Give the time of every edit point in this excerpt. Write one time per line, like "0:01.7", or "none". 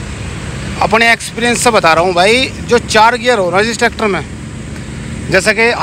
none